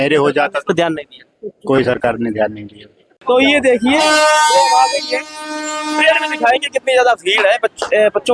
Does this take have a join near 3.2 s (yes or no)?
yes